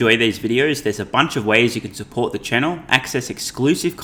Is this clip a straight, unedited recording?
yes; 0 cuts

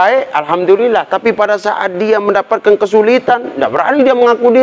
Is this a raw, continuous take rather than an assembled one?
yes; 0 cuts

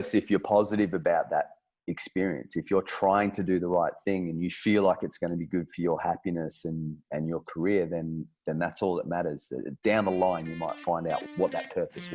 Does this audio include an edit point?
yes; 1 cut; at 11.2 s

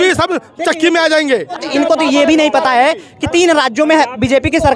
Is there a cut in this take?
yes; 1 cut; at 1.6 s

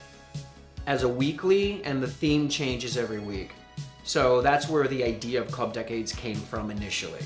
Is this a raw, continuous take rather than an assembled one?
yes; 0 cuts

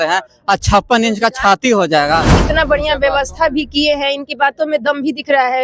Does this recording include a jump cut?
yes; 1 cut; at 2.4 s

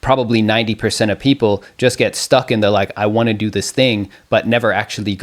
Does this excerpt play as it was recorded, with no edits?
yes; 0 cuts

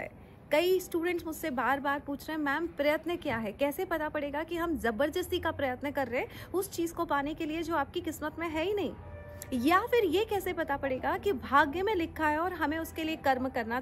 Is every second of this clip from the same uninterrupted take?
yes; 0 cuts

